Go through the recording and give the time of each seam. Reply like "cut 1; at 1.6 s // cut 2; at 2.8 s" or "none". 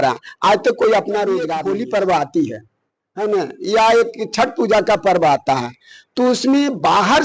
cut 1; at 1.5 s